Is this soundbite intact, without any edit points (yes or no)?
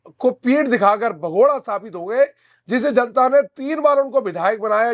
yes